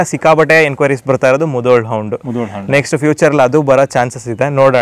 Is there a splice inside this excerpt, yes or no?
no